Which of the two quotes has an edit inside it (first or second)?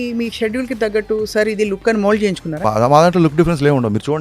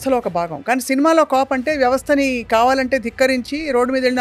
first